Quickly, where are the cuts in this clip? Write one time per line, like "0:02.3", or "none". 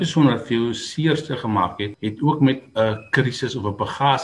0:01.9